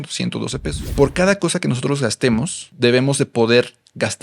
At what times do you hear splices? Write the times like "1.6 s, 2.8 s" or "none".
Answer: 0.8 s, 2.6 s